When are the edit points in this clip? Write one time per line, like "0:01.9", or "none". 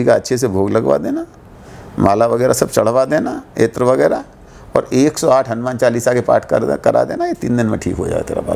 none